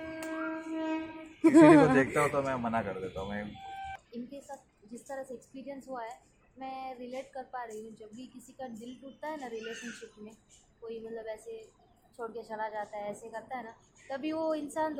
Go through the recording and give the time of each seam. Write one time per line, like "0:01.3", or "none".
none